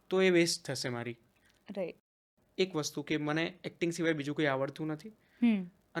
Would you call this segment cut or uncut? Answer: cut